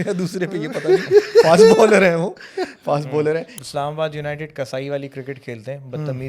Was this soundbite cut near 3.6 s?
yes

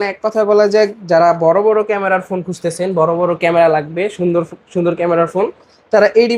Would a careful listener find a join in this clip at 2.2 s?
no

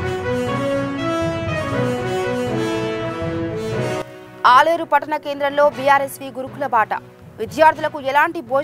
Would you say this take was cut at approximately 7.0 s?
no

